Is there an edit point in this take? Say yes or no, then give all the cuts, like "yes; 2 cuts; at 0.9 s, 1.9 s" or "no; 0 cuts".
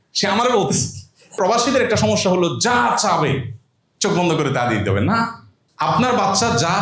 yes; 1 cut; at 1.4 s